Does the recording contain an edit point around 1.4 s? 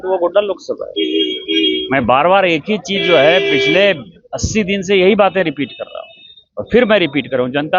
no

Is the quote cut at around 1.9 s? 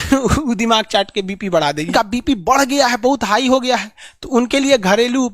yes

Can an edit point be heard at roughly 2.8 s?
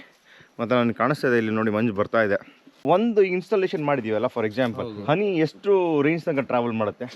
yes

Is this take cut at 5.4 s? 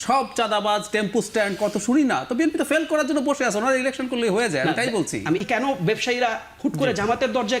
yes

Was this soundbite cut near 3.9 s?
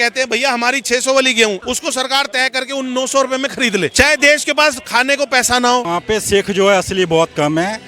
yes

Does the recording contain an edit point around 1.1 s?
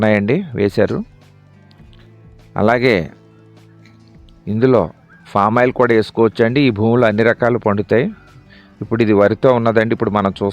yes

